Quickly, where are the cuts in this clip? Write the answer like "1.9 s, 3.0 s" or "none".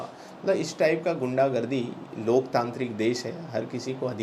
none